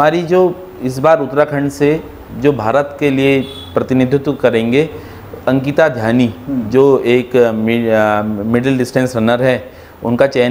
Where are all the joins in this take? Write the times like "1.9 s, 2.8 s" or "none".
none